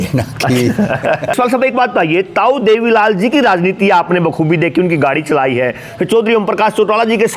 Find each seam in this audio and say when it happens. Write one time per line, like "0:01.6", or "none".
0:01.3